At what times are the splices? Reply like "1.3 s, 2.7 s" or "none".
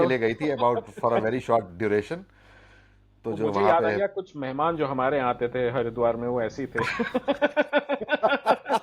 none